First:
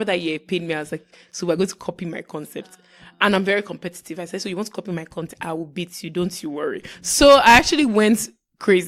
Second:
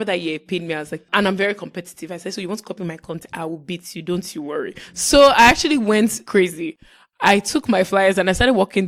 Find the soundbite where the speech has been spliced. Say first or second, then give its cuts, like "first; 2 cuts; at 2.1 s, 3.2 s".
second; 2 cuts; at 1.0 s, 6.2 s